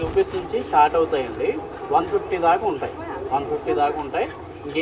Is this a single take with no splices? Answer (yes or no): yes